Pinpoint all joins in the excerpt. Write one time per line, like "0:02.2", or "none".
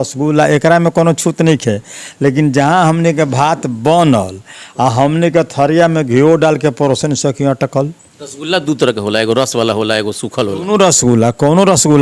none